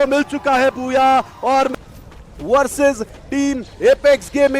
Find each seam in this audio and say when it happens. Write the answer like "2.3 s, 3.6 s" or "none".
1.7 s